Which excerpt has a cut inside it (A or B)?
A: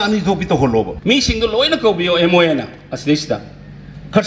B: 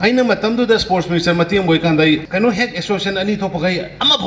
A